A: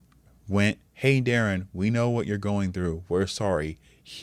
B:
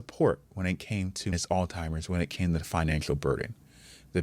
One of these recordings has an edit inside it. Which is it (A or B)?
B